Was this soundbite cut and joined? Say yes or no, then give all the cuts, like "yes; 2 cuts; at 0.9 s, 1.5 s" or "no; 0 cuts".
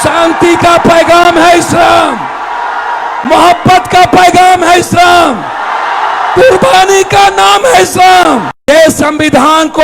yes; 1 cut; at 8.5 s